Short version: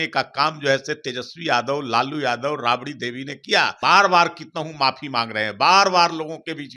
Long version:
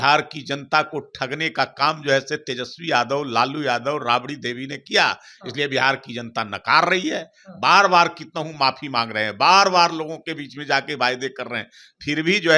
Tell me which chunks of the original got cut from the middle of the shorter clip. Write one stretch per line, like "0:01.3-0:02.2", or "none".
0:05.2-0:07.5